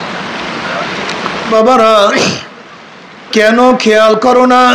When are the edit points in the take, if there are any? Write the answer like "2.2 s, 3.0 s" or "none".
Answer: 1.5 s